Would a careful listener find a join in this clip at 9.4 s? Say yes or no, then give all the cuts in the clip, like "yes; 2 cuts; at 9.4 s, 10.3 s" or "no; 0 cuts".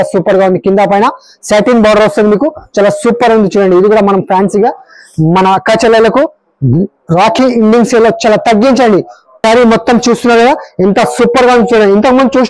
yes; 1 cut; at 9.4 s